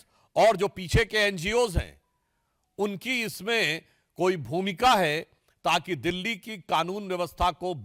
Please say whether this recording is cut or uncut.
uncut